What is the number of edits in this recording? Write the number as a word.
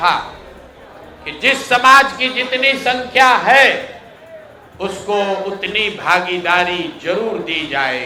zero